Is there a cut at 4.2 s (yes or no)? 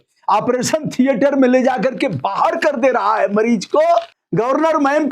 yes